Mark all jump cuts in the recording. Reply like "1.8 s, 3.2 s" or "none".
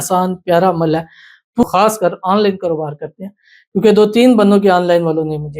1.6 s